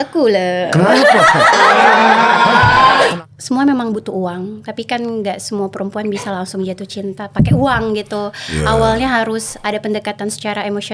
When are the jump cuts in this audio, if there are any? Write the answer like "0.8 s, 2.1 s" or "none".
3.1 s